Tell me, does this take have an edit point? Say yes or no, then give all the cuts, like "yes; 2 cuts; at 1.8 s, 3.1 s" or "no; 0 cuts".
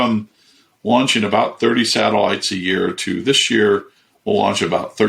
no; 0 cuts